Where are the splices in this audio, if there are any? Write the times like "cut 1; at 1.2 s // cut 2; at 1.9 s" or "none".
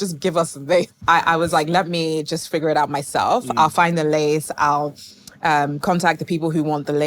cut 1; at 0.9 s